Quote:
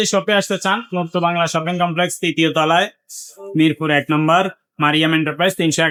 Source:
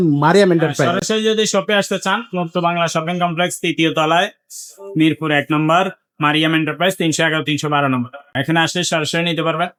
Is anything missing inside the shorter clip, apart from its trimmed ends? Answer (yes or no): no